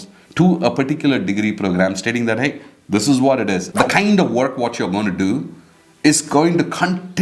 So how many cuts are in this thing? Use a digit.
1